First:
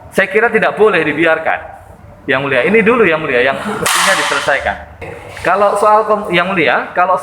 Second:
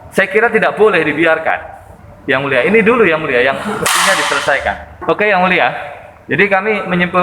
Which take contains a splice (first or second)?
second